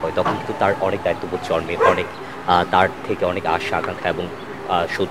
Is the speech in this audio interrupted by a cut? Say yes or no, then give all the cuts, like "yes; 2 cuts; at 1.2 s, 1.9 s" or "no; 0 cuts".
no; 0 cuts